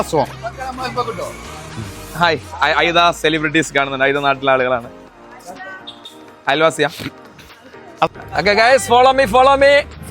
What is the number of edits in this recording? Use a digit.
1